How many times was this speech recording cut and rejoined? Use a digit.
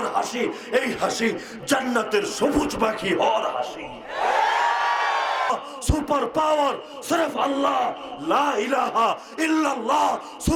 1